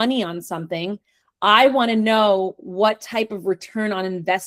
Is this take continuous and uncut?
yes; 0 cuts

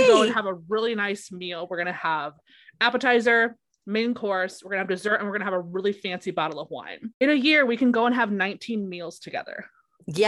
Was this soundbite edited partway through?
yes; 1 cut; at 7.0 s

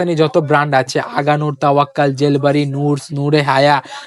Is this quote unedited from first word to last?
yes; 0 cuts

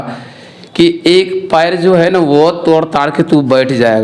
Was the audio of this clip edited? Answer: no; 0 cuts

